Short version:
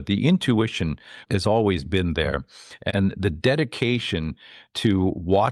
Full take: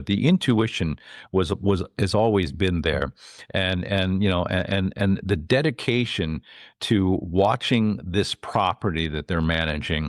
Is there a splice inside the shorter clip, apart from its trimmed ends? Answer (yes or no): yes